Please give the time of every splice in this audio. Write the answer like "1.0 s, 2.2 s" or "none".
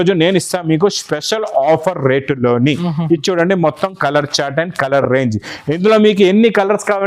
none